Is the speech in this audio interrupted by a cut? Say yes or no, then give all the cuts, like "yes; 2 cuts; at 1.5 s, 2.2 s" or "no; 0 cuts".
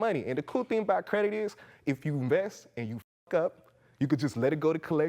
no; 0 cuts